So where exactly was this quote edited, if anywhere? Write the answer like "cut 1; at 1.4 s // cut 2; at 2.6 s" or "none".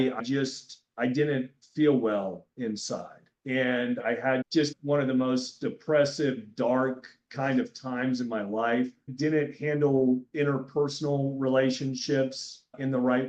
none